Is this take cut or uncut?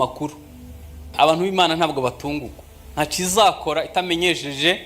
cut